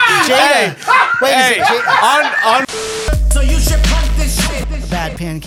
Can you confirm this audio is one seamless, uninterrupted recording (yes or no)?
no